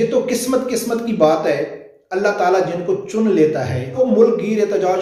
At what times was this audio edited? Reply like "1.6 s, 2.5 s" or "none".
3.9 s